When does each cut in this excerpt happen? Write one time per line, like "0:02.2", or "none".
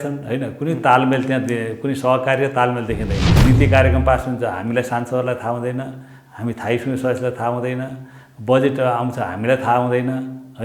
0:03.4